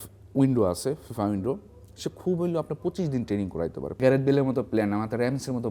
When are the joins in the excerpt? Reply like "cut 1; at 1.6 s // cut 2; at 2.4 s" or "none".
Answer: cut 1; at 4.0 s